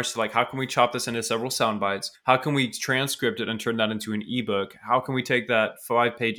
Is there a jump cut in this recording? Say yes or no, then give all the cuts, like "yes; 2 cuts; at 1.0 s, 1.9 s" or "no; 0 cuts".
yes; 1 cut; at 2.1 s